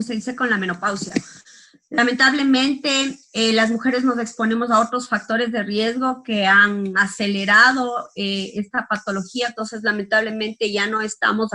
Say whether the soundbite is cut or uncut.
cut